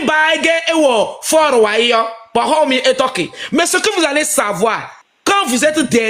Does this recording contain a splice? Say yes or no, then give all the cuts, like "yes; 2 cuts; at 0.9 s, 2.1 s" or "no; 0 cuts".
no; 0 cuts